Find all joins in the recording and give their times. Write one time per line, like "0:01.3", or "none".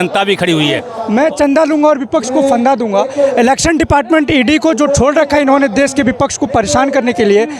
0:00.9